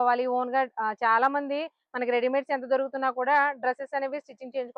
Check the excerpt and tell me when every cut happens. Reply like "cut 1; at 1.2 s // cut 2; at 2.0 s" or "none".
none